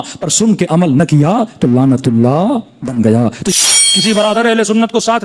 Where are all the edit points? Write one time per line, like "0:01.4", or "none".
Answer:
0:03.5